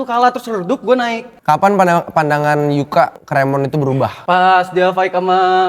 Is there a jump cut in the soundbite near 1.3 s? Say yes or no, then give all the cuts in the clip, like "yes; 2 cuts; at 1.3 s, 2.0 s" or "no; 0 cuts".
yes; 1 cut; at 1.3 s